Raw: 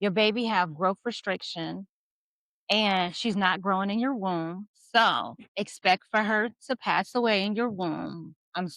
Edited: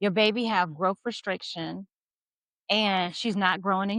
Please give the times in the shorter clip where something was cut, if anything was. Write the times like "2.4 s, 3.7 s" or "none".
none